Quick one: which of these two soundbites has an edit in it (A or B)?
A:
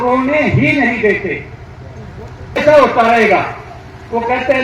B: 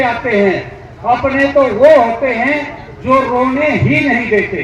A